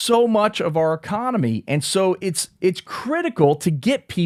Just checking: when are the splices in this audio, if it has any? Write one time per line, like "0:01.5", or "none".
none